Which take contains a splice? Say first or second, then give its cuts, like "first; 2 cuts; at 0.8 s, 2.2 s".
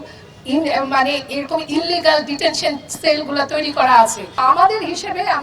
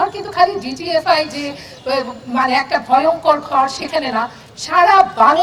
first; 1 cut; at 4.4 s